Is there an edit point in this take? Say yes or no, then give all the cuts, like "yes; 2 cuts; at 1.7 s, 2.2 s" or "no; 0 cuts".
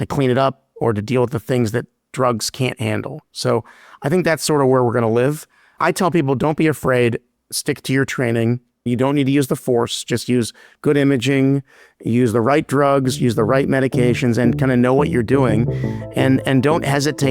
yes; 1 cut; at 8.8 s